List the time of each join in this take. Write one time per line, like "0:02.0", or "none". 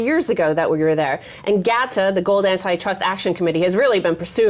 none